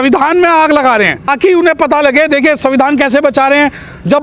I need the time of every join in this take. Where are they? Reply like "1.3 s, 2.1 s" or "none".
1.3 s